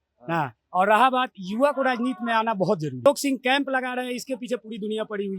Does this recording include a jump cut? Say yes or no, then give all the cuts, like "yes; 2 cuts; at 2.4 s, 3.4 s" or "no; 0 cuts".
yes; 1 cut; at 3.1 s